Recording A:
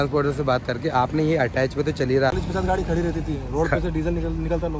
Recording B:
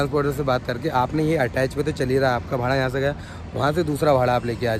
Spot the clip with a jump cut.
A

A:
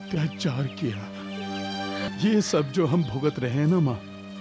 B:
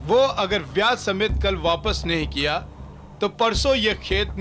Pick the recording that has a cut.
A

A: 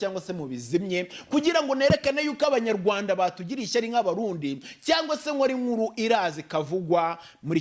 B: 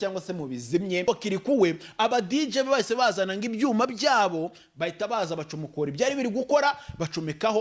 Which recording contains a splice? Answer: B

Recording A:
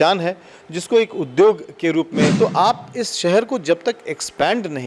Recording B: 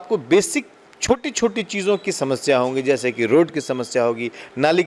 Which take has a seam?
A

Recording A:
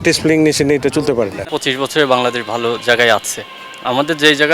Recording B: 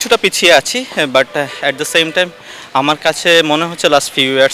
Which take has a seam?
A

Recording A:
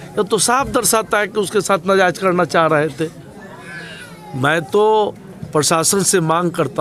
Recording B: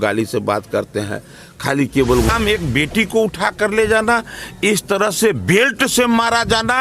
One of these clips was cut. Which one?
B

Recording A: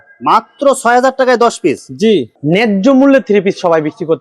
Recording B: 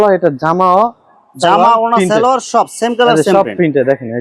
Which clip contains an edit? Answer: A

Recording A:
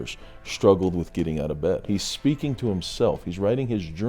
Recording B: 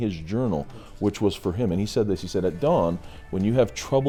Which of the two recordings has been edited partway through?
A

